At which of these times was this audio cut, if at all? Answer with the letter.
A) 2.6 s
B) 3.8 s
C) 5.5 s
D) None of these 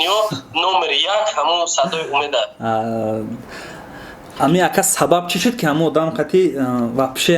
D